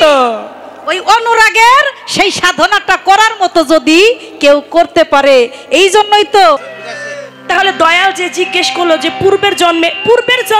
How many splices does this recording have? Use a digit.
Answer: 1